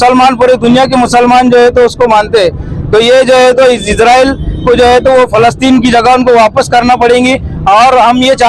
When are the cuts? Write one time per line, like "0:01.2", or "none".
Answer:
none